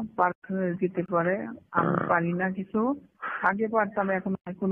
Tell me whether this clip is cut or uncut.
uncut